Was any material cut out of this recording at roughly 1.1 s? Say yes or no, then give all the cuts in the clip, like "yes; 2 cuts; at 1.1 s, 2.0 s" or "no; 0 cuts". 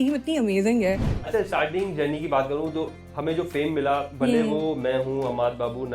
yes; 1 cut; at 1.1 s